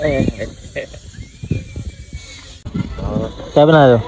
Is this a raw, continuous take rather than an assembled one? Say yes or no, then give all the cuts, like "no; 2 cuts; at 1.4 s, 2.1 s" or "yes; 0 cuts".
no; 1 cut; at 2.8 s